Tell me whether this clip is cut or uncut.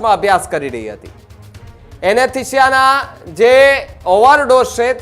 uncut